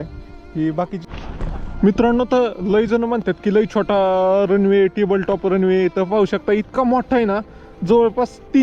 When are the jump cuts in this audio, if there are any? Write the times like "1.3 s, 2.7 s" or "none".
1.1 s

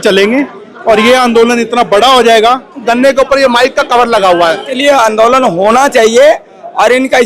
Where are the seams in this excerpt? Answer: 2.8 s, 4.7 s

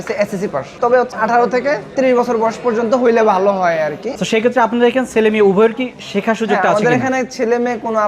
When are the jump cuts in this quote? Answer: 1.0 s, 4.1 s

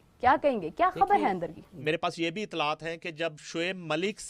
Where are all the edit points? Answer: 1.8 s

